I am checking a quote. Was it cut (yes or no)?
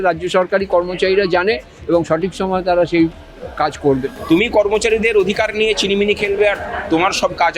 yes